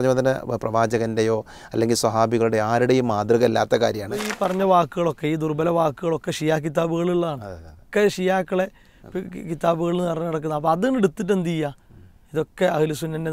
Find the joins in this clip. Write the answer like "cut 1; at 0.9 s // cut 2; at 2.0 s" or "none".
cut 1; at 4.3 s